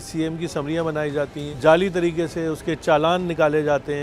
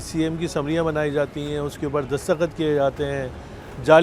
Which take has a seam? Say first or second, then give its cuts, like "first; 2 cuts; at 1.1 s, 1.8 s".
first; 1 cut; at 1.4 s